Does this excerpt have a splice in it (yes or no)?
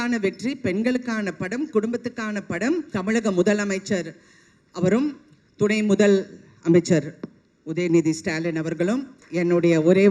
yes